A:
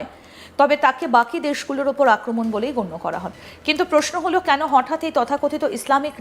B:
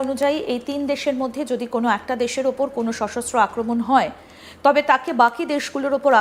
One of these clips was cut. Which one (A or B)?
A